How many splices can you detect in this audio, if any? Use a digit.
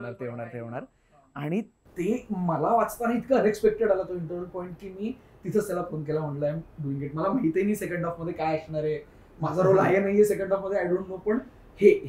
0